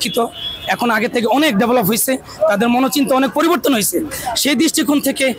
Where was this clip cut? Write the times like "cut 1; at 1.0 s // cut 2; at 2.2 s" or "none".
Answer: none